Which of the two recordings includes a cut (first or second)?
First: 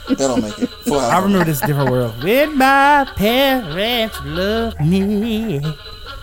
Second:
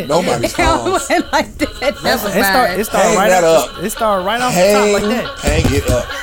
second